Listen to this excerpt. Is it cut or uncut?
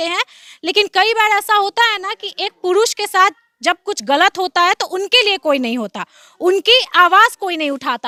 uncut